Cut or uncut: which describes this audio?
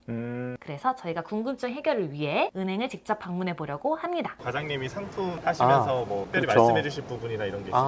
cut